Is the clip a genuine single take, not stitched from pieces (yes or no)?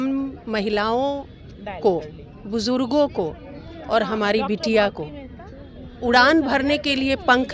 yes